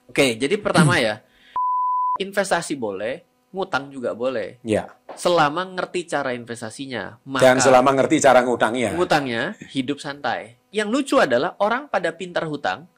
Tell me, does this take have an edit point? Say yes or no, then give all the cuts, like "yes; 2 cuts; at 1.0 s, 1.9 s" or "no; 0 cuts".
yes; 2 cuts; at 1.8 s, 10.6 s